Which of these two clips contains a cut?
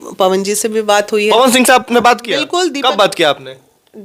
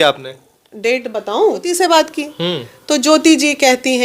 second; 1 cut; at 1.7 s

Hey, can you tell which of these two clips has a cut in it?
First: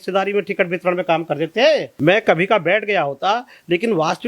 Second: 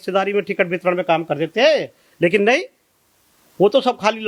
first; 1 cut; at 1.9 s

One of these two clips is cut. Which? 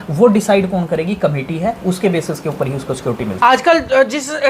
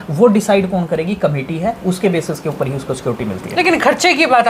first; 1 cut; at 3.3 s

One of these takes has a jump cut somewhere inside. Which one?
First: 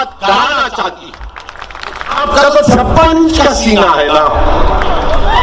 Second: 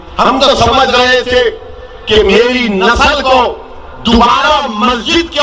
first; 1 cut; at 2.2 s

